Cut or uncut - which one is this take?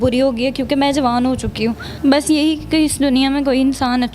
cut